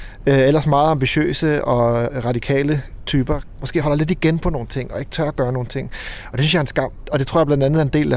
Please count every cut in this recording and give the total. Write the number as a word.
three